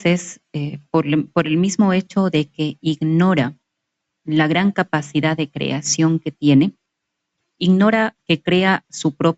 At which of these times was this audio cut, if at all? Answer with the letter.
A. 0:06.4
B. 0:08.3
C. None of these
C